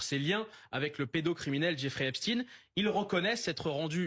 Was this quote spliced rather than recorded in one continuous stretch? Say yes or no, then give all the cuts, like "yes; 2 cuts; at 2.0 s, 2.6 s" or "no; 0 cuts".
no; 0 cuts